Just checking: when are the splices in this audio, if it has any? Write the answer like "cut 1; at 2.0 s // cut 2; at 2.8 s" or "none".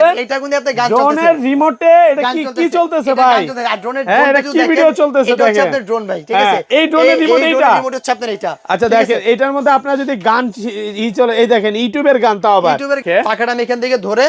cut 1; at 13.0 s